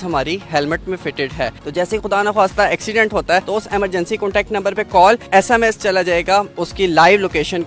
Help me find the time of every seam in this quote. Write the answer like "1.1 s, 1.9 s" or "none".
1.5 s, 3.5 s, 5.2 s, 6.5 s